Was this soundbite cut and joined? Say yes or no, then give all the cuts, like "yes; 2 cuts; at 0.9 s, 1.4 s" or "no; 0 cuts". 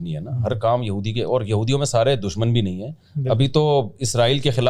no; 0 cuts